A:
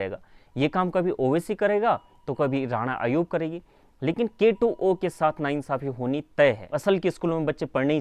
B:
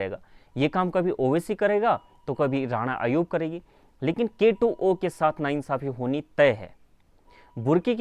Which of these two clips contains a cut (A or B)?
A